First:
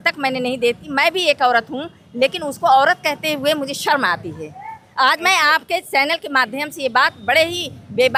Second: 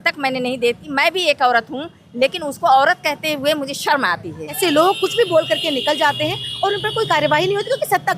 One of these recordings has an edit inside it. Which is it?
second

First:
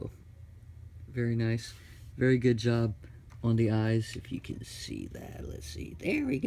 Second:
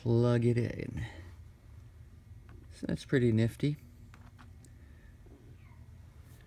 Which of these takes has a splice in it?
first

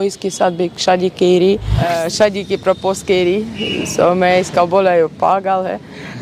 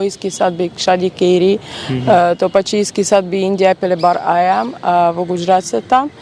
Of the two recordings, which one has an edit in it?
first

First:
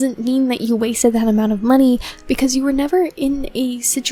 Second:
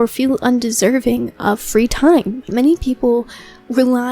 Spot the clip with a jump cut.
second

